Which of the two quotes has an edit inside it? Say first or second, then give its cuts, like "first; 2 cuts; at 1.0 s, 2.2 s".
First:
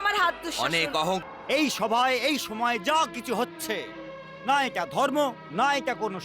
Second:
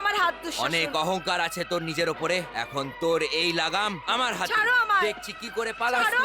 first; 1 cut; at 1.2 s